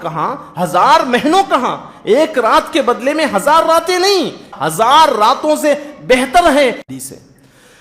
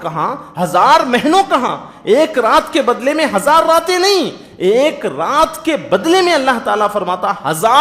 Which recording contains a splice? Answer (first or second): first